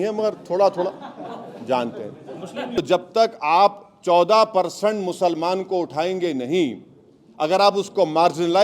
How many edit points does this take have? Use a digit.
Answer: 1